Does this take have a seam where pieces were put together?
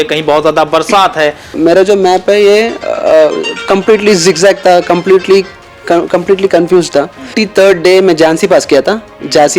yes; 2 cuts; at 1.6 s, 7.4 s

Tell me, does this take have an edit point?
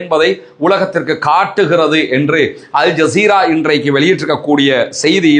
no; 0 cuts

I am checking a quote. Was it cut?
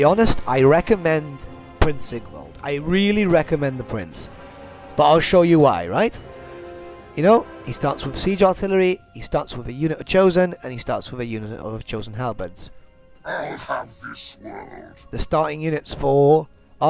yes; 1 cut; at 7.3 s

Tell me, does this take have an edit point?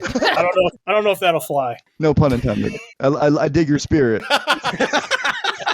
yes; 4 cuts; at 0.8 s, 1.8 s, 2.9 s, 4.3 s

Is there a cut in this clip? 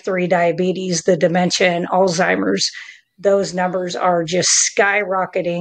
no; 0 cuts

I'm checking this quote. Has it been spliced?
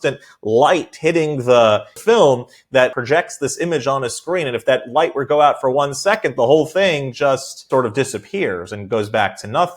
yes; 3 cuts; at 1.9 s, 2.9 s, 7.7 s

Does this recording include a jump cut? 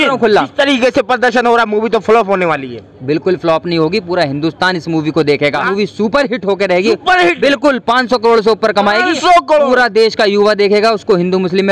yes; 1 cut; at 5.7 s

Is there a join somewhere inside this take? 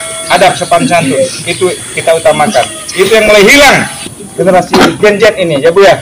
yes; 1 cut; at 4.2 s

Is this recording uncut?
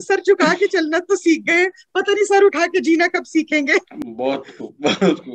yes; 0 cuts

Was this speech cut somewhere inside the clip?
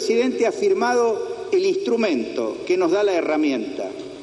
no; 0 cuts

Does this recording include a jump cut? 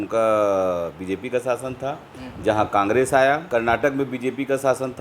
yes; 1 cut; at 3.4 s

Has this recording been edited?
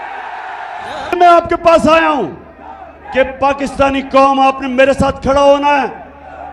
yes; 1 cut; at 1.1 s

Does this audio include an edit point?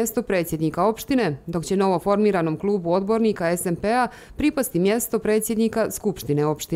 no; 0 cuts

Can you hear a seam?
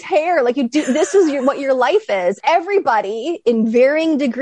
yes; 2 cuts; at 2.4 s, 3.4 s

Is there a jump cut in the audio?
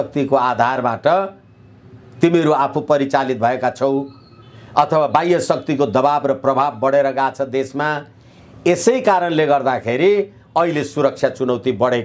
no; 0 cuts

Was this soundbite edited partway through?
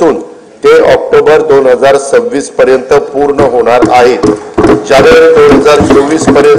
no; 0 cuts

